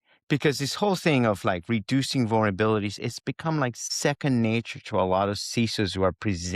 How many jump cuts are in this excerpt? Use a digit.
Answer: 1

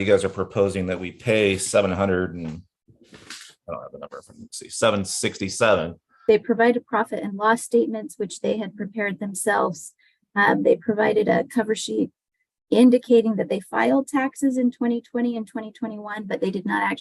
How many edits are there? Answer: 1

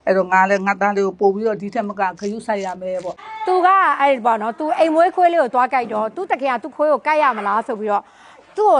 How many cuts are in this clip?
0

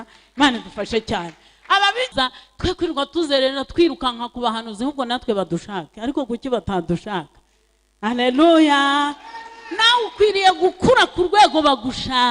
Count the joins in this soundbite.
1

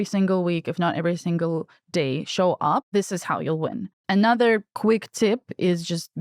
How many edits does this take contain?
3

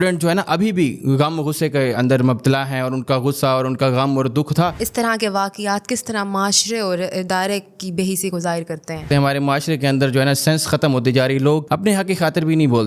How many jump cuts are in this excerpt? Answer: 3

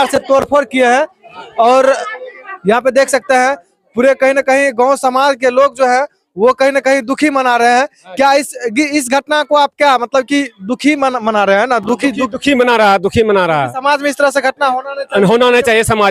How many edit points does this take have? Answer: 0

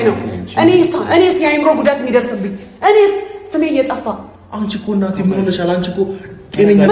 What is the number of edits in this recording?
0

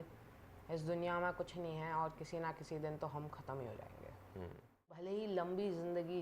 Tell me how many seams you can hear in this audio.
1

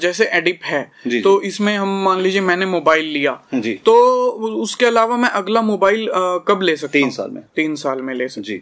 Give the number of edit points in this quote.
0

